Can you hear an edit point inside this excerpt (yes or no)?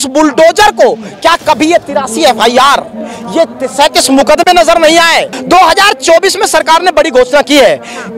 yes